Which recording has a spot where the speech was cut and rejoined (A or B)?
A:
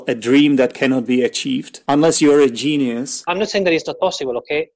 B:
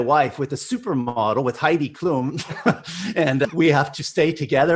A